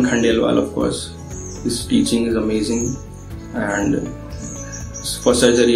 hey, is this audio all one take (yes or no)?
yes